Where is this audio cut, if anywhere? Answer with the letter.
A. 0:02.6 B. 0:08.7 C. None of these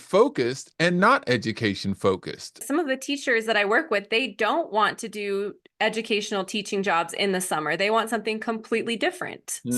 A